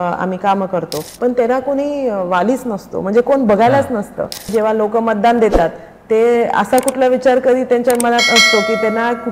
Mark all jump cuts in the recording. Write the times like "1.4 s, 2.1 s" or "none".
1.0 s, 4.5 s